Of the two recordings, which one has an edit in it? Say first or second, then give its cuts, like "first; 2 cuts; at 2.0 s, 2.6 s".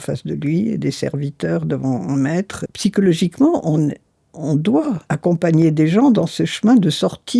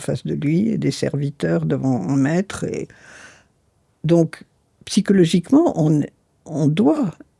first; 2 cuts; at 2.6 s, 5.0 s